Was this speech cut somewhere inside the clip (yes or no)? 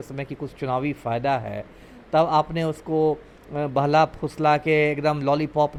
no